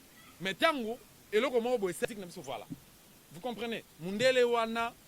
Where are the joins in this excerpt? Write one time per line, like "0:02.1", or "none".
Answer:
0:02.0